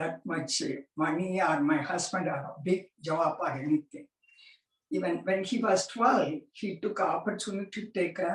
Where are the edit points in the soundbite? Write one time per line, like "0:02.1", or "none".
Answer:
none